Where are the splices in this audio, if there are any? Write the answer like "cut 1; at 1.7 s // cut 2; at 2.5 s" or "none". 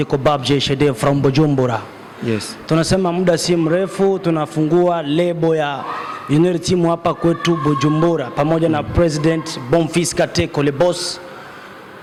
none